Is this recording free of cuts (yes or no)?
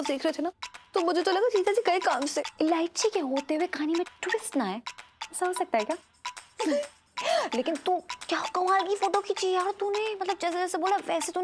no